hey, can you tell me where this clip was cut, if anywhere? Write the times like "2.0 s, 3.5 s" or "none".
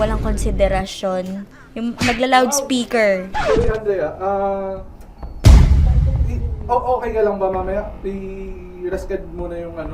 3.3 s